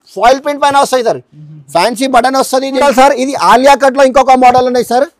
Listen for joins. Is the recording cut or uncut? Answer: cut